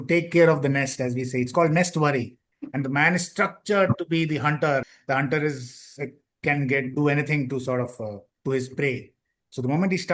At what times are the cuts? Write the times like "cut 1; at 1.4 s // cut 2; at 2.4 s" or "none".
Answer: cut 1; at 4.9 s

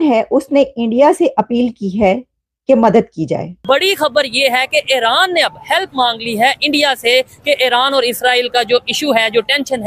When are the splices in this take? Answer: cut 1; at 3.6 s

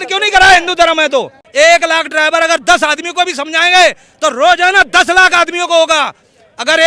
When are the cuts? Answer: cut 1; at 1.4 s

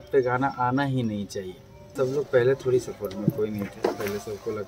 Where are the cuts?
cut 1; at 1.9 s

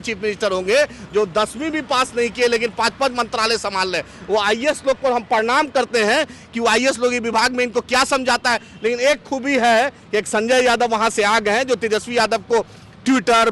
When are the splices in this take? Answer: none

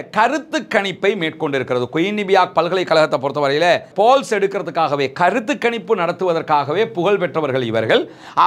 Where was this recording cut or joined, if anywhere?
cut 1; at 3.9 s

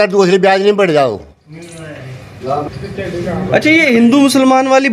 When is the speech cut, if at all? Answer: cut 1; at 2.7 s

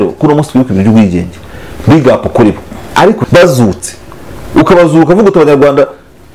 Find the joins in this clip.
cut 1; at 3.2 s

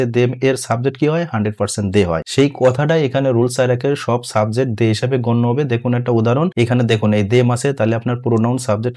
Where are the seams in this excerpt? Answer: cut 1; at 2.3 s // cut 2; at 6.5 s

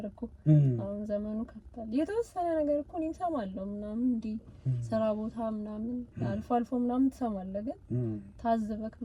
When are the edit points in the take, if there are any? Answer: none

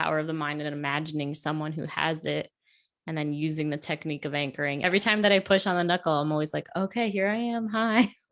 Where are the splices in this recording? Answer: cut 1; at 4.8 s

